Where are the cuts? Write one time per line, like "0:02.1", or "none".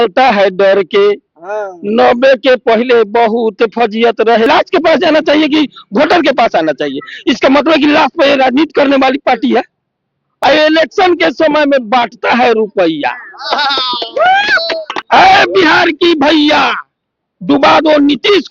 0:04.5
0:10.2
0:14.9

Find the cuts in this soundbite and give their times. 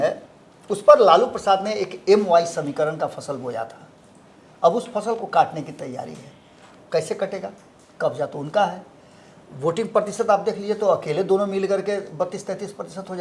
none

